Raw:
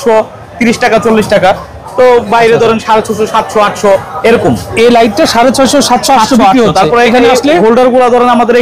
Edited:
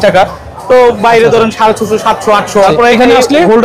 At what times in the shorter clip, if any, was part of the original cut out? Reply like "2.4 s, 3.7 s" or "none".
2.7 s